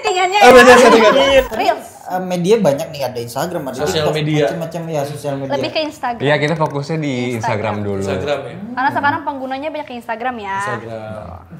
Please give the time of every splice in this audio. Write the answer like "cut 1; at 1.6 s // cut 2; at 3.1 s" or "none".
cut 1; at 1.5 s